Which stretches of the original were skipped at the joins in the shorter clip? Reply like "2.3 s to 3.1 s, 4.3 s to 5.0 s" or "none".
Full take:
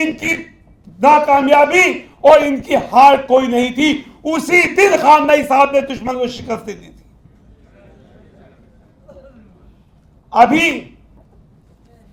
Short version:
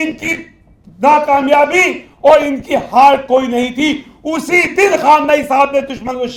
none